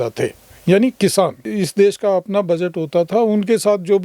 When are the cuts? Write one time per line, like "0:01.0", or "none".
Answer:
0:01.5